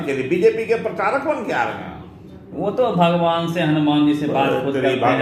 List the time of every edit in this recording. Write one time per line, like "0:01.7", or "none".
none